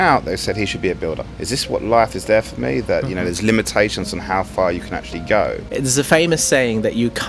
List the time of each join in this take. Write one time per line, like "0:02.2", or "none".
0:01.3
0:05.6